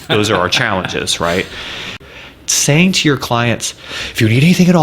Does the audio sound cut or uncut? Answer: cut